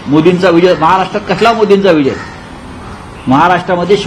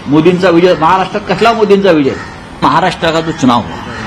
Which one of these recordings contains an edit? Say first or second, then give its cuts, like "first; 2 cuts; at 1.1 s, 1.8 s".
second; 1 cut; at 2.6 s